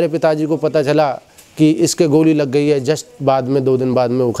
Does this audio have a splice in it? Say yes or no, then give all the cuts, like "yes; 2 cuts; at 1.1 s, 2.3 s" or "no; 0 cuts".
no; 0 cuts